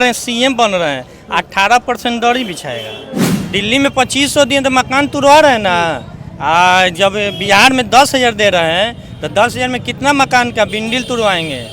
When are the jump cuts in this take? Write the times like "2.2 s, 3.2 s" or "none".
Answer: 3.2 s